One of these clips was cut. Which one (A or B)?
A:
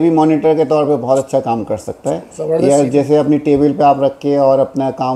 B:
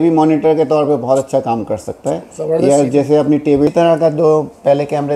B